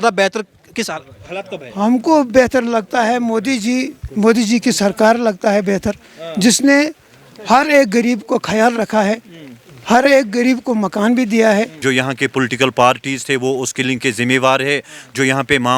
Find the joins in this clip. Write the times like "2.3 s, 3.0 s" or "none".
11.7 s